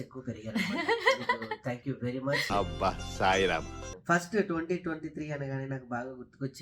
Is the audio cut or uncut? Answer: cut